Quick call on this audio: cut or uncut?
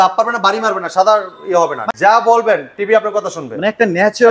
cut